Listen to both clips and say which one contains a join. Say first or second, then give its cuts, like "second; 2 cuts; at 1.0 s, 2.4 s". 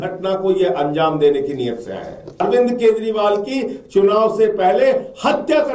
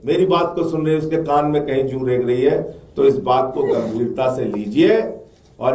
first; 1 cut; at 2.4 s